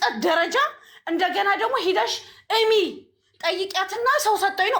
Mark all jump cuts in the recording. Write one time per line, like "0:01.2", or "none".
none